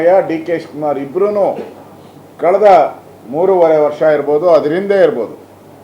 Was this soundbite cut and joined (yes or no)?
no